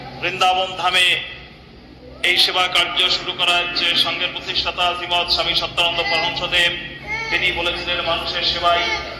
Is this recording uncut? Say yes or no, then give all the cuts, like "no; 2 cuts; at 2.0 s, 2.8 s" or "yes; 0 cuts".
yes; 0 cuts